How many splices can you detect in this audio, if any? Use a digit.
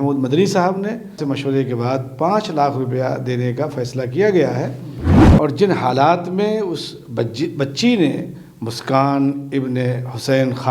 2